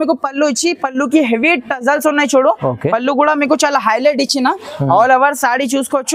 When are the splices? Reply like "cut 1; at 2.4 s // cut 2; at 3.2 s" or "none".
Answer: none

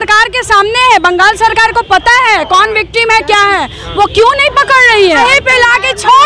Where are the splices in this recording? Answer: cut 1; at 5.2 s

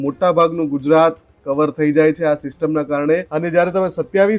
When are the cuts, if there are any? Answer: cut 1; at 3.3 s

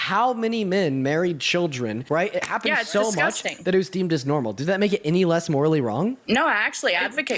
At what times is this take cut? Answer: cut 1; at 2.0 s // cut 2; at 6.2 s

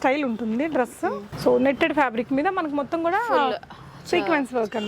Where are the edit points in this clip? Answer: cut 1; at 1.3 s

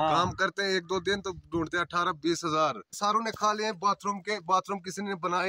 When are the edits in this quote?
cut 1; at 3.0 s

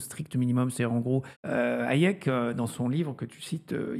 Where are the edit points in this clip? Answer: cut 1; at 1.4 s

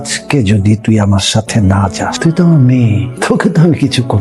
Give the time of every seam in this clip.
cut 1; at 2.1 s // cut 2; at 3.1 s

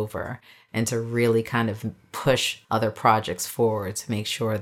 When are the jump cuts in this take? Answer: cut 1; at 2.5 s

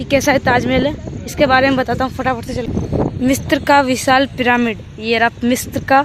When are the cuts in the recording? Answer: cut 1; at 2.7 s

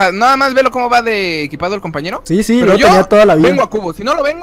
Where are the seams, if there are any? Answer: cut 1; at 2.2 s // cut 2; at 3.5 s

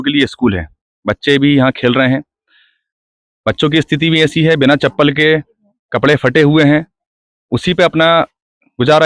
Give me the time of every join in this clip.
none

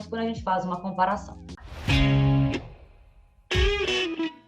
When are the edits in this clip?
cut 1; at 1.7 s

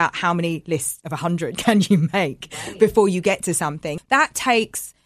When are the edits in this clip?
cut 1; at 3.9 s

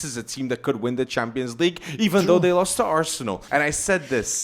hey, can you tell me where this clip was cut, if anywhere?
cut 1; at 3.4 s

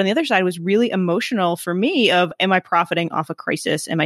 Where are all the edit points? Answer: none

